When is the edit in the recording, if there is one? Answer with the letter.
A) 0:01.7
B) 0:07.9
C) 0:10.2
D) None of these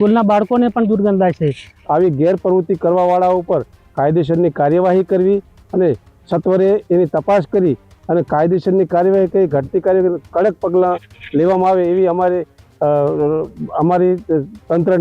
A